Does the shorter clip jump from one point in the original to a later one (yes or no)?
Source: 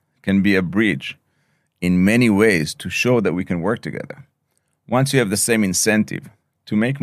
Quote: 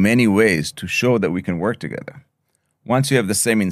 no